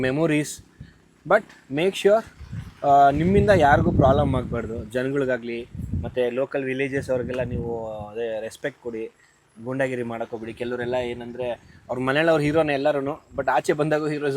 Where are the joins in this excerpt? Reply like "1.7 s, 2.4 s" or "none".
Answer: none